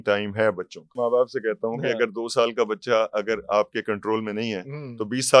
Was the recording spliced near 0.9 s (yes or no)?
yes